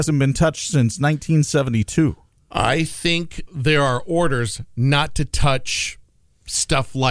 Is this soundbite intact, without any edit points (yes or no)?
no